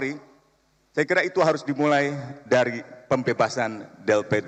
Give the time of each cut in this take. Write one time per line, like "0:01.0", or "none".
none

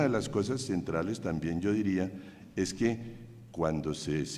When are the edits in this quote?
0:03.0

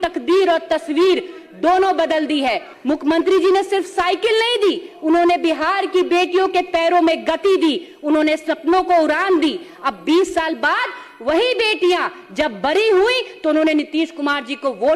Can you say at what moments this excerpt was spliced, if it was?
0:02.7

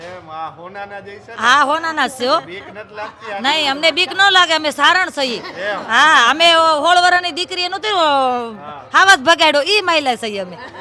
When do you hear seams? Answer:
none

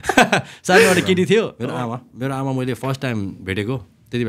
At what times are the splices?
0:01.6

